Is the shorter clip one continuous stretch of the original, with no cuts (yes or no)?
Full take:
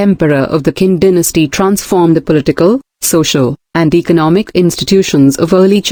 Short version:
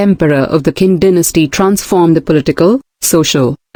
yes